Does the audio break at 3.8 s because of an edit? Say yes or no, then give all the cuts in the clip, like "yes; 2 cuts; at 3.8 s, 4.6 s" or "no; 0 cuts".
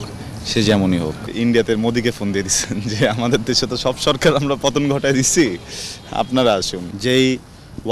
no; 2 cuts; at 1.3 s, 6.8 s